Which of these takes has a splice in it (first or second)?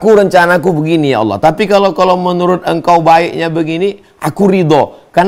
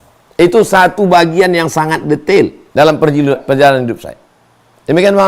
second